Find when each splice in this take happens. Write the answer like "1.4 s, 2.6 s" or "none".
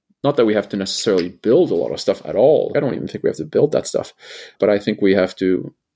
2.7 s, 4.5 s